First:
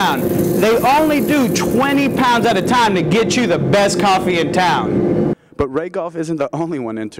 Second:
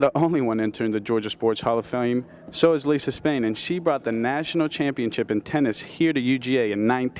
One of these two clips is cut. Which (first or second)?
first